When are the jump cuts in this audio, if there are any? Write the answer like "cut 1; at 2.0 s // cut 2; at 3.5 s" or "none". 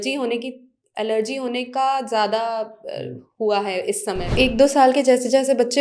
cut 1; at 4.2 s